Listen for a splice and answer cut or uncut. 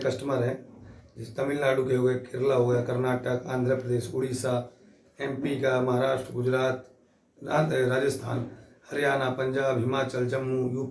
uncut